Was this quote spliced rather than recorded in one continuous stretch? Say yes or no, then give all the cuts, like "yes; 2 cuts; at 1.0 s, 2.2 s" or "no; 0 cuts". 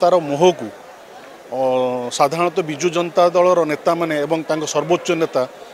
no; 0 cuts